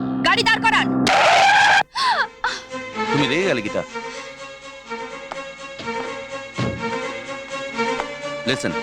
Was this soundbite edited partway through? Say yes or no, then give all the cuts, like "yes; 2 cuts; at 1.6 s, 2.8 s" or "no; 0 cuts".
no; 0 cuts